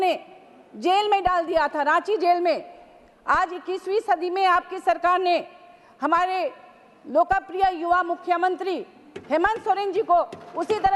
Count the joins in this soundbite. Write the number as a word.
zero